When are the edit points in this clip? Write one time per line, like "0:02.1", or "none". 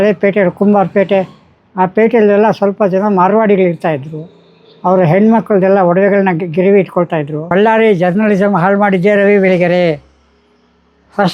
0:07.4